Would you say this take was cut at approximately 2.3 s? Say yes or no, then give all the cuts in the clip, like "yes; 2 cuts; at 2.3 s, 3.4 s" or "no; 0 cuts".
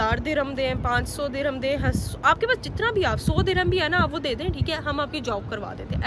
no; 0 cuts